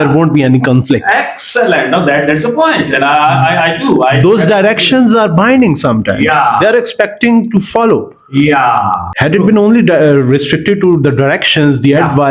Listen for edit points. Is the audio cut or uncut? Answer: uncut